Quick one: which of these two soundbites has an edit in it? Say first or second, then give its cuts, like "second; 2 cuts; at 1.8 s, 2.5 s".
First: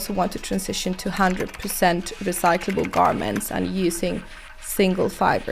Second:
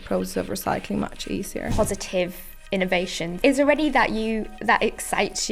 second; 2 cuts; at 1.7 s, 3.4 s